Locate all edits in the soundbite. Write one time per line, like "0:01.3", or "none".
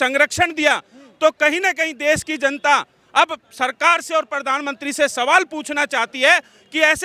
none